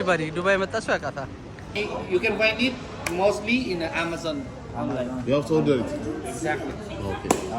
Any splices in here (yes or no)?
yes